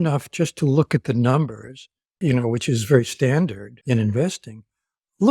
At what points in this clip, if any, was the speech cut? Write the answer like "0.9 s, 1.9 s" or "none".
2.2 s, 3.7 s